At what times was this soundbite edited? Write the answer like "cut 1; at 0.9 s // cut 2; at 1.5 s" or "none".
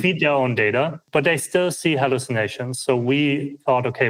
none